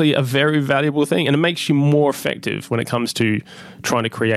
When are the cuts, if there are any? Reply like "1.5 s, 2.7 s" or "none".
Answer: 1.6 s

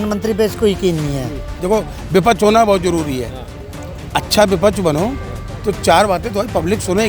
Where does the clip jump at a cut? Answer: 1.6 s

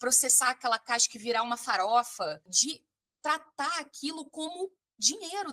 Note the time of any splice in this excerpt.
2.5 s

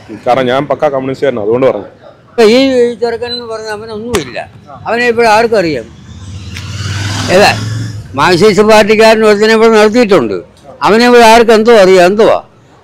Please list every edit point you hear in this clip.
2.3 s

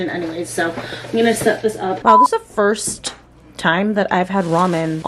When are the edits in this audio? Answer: 2.0 s

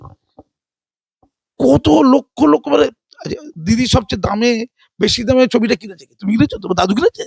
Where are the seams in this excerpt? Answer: none

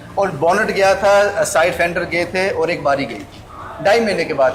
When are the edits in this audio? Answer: none

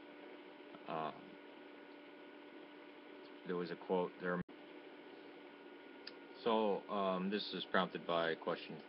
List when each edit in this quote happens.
none

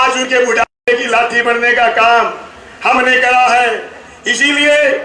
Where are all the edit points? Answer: none

